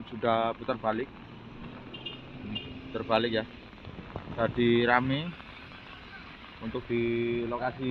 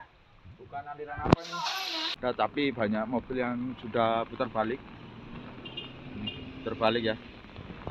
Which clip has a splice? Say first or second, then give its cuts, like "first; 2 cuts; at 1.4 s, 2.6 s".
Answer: second; 1 cut; at 2.1 s